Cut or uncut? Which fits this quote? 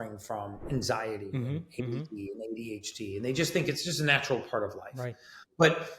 uncut